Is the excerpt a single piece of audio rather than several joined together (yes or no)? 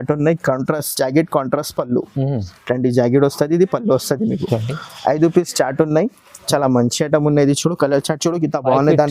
yes